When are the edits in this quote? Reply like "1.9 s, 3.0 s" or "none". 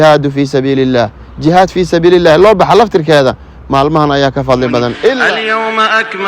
5.2 s